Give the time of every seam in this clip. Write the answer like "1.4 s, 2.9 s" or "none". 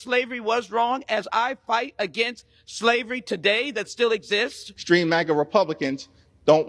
4.7 s